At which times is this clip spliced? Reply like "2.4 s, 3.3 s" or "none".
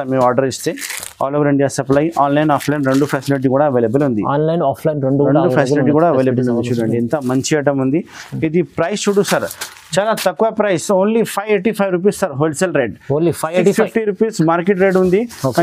none